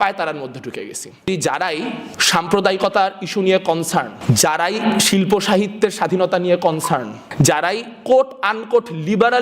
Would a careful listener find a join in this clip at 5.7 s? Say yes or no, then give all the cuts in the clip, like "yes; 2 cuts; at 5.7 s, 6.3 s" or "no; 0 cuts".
no; 4 cuts; at 1.3 s, 2.1 s, 4.1 s, 7.2 s